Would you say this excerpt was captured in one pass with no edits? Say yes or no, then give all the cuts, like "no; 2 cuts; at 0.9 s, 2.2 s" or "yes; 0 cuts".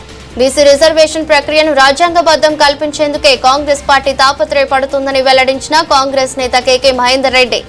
yes; 0 cuts